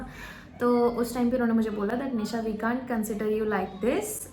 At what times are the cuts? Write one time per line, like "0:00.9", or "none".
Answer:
none